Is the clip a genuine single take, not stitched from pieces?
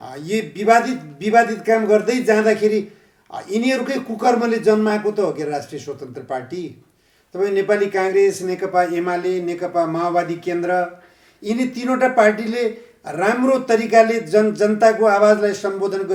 yes; 0 cuts

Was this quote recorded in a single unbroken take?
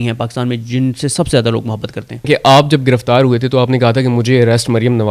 no; 1 cut; at 2.3 s

